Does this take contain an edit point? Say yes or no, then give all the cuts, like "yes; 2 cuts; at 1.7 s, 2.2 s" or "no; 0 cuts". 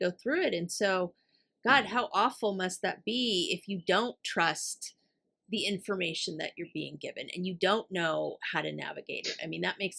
no; 0 cuts